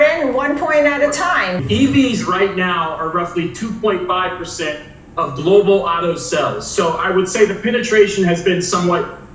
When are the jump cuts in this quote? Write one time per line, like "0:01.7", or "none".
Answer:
0:01.6